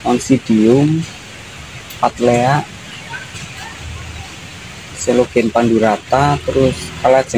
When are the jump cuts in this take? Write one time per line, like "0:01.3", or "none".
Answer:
none